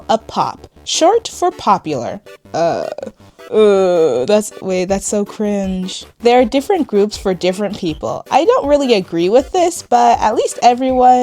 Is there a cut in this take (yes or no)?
yes